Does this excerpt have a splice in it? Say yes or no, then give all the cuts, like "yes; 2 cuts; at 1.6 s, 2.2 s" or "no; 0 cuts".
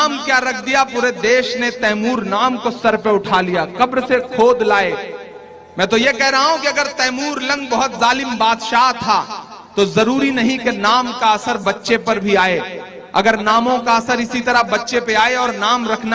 no; 0 cuts